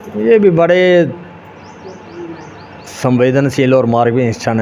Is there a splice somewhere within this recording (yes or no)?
no